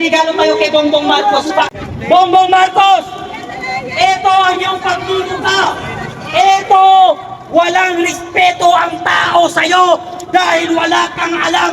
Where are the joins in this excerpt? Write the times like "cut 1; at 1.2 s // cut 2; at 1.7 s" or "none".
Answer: cut 1; at 1.7 s